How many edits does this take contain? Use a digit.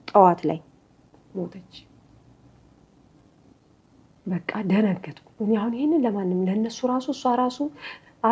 0